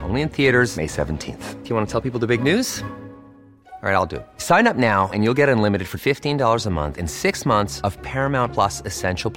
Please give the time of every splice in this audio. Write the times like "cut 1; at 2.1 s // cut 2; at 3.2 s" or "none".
none

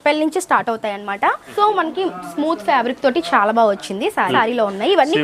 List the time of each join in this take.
cut 1; at 1.5 s // cut 2; at 4.3 s

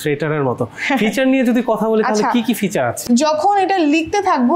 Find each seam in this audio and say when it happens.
cut 1; at 3.0 s

